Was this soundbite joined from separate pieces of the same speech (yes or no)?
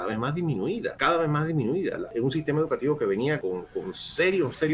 yes